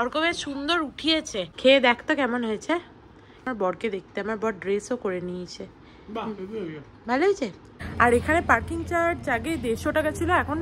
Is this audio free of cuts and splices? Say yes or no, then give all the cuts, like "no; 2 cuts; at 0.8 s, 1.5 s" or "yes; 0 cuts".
no; 3 cuts; at 1.5 s, 3.5 s, 7.8 s